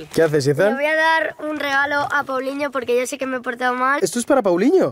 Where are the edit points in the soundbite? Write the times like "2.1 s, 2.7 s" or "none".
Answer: 4.0 s